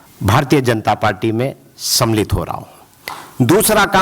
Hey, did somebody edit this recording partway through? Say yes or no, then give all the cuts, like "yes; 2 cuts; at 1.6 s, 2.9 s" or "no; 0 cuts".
no; 0 cuts